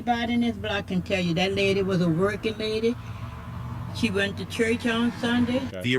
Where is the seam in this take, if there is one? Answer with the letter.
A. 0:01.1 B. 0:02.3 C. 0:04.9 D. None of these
C